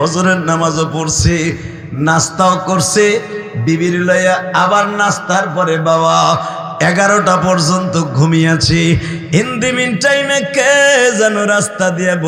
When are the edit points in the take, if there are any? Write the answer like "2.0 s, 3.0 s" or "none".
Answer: none

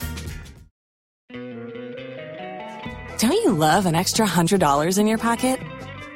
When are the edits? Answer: 1.4 s

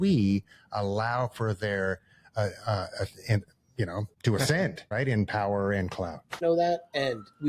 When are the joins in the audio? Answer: 4.1 s, 4.9 s, 6.4 s

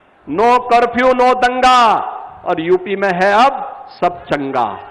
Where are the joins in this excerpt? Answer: none

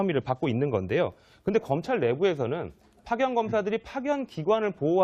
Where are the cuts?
3.4 s

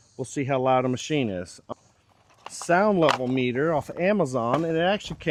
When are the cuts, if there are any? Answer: none

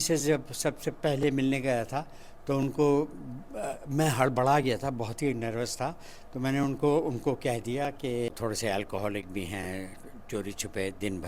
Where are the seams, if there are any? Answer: 8.3 s

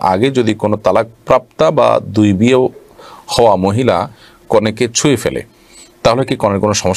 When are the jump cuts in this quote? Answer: none

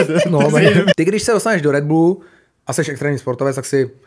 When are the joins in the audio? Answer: 0.9 s

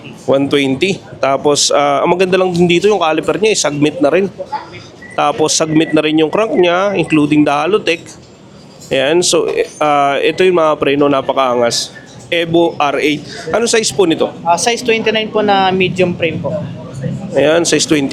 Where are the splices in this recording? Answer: none

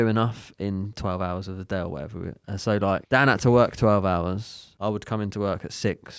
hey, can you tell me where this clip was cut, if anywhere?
1.0 s, 3.0 s, 4.6 s

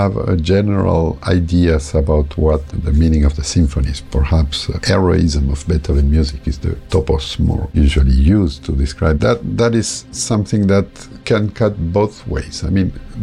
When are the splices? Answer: 2.8 s, 4.7 s, 6.8 s, 10.0 s

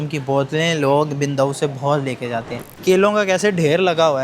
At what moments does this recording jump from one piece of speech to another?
2.7 s

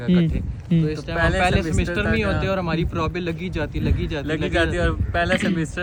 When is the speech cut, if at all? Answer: none

